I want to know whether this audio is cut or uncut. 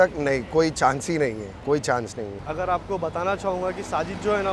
uncut